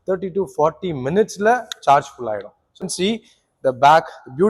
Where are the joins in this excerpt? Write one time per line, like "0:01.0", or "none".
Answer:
0:02.9